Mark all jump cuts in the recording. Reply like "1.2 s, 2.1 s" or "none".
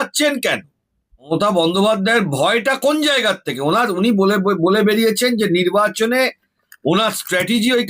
1.3 s